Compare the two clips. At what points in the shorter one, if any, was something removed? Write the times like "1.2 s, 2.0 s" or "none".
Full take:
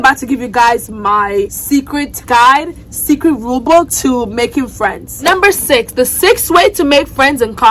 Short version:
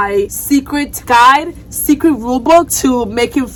none